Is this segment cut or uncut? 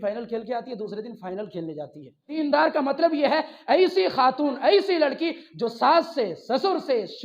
cut